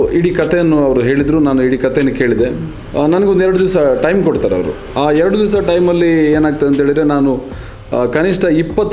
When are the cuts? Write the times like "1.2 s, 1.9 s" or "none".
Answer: 2.7 s, 4.8 s

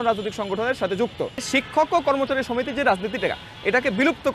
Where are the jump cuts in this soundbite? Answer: 1.5 s

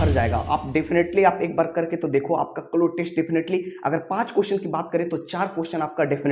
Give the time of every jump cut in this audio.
none

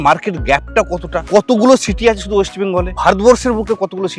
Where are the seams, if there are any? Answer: 1.2 s, 2.9 s

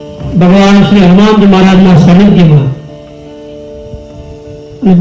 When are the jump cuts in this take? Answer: none

